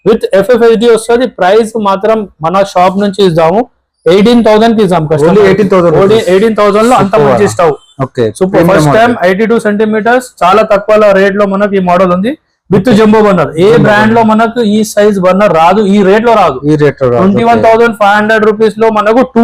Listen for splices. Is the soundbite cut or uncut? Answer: uncut